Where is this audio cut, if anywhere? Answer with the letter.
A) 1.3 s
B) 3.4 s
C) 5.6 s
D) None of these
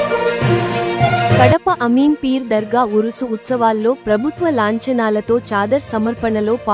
A